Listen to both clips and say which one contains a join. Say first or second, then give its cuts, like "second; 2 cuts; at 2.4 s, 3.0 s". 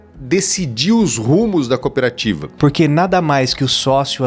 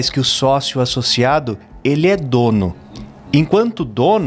first; 1 cut; at 2.5 s